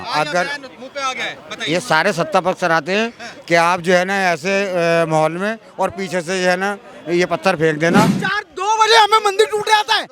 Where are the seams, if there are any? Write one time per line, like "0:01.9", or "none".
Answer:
0:08.2